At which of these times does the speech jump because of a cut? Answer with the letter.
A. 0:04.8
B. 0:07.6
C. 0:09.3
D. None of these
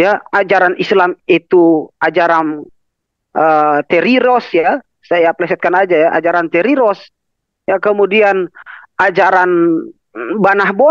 D